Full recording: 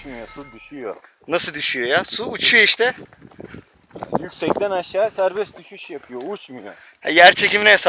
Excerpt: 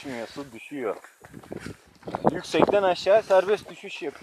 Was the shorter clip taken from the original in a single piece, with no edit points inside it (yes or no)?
no